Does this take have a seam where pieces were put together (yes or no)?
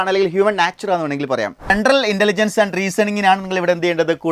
yes